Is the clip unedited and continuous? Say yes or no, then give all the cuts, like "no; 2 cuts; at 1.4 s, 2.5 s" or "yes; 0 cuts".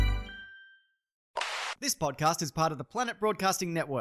no; 1 cut; at 1.4 s